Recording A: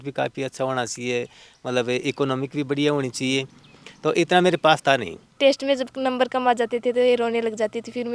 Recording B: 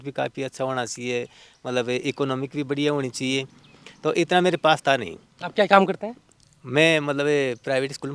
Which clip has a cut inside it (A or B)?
A